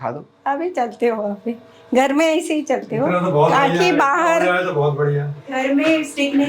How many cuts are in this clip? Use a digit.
0